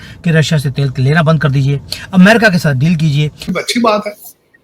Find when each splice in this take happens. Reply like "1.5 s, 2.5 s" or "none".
3.5 s